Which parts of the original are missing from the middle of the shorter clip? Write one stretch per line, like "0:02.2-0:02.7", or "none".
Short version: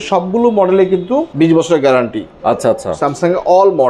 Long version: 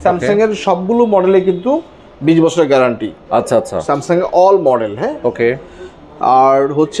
0:01.8-0:02.2